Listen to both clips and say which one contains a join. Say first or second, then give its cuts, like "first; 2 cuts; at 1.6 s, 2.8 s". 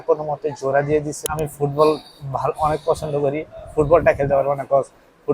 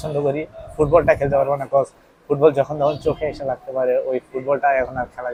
first; 1 cut; at 1.2 s